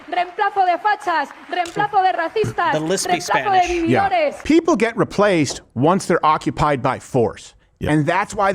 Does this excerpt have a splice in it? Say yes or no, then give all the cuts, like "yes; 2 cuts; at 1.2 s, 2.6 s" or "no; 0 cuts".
yes; 1 cut; at 4.4 s